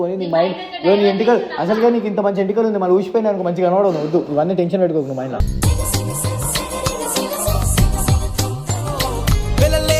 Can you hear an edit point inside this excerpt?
no; 0 cuts

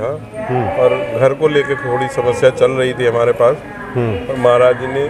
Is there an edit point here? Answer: no; 0 cuts

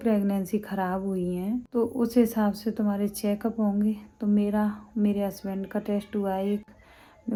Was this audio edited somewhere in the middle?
no; 0 cuts

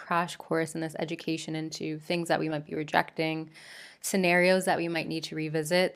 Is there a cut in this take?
no; 0 cuts

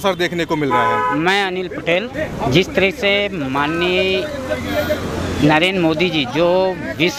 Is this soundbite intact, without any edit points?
yes; 0 cuts

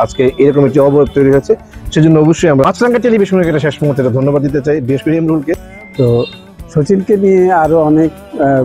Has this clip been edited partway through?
yes; 2 cuts; at 2.6 s, 5.8 s

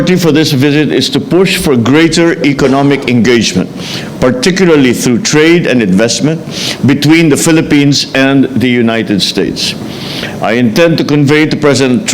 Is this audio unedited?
yes; 0 cuts

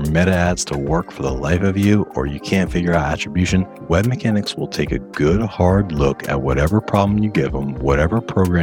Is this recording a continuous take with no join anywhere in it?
yes; 0 cuts

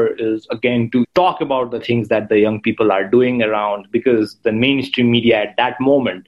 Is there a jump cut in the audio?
yes; 1 cut; at 1.1 s

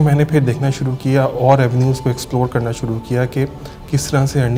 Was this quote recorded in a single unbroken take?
yes; 0 cuts

